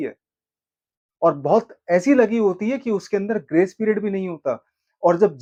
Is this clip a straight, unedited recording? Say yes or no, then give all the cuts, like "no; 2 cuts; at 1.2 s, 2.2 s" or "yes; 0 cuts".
yes; 0 cuts